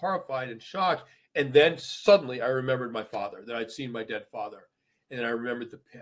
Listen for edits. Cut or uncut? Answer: uncut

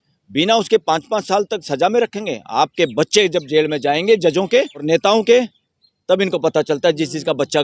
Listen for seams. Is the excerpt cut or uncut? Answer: cut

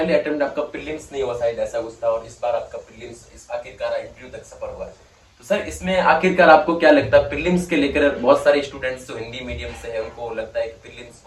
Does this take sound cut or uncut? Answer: uncut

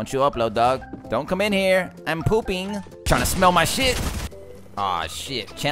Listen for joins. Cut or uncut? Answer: cut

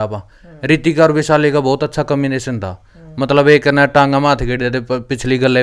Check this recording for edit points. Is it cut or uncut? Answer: uncut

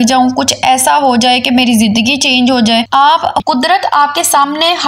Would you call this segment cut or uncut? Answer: cut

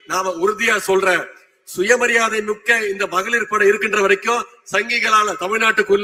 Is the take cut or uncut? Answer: uncut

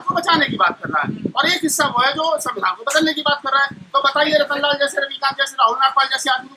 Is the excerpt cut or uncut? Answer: uncut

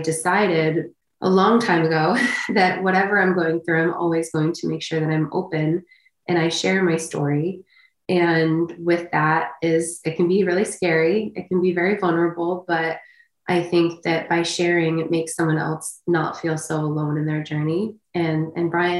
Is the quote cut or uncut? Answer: uncut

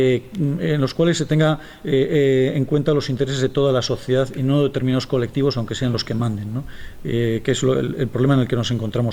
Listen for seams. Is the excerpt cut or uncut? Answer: uncut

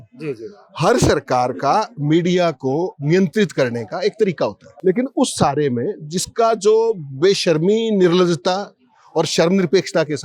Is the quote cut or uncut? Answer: cut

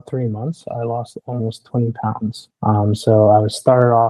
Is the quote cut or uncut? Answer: uncut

